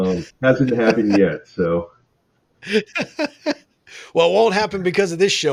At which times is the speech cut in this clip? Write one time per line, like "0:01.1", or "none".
none